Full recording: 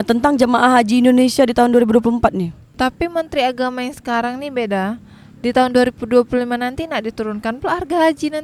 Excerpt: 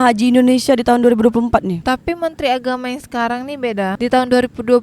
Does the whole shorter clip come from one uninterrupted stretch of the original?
no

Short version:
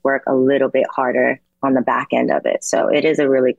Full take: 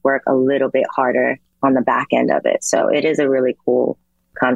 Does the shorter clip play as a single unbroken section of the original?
yes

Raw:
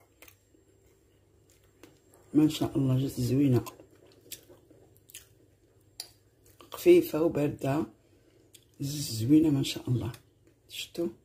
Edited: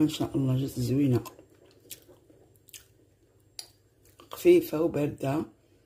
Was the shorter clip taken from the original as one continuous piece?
yes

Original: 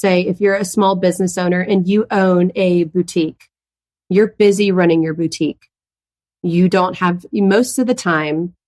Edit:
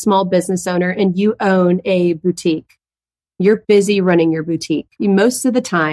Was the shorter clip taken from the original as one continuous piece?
no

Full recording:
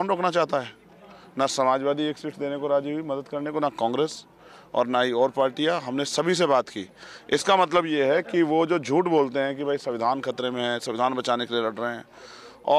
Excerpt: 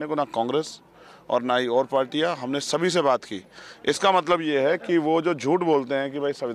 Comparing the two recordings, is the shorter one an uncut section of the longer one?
yes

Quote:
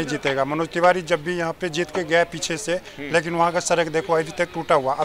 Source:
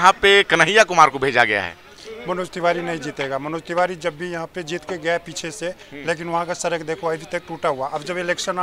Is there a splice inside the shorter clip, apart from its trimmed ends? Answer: no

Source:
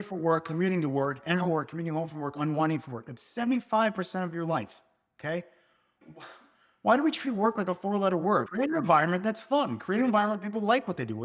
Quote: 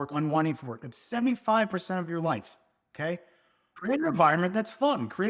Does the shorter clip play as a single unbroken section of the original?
no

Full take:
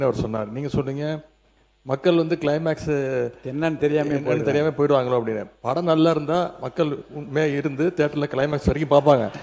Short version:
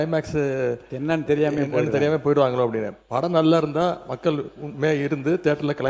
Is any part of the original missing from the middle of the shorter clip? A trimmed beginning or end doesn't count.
no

